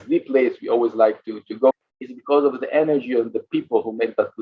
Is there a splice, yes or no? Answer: yes